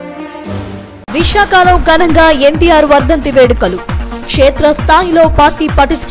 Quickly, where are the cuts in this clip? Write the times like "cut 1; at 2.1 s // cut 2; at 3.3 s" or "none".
cut 1; at 0.9 s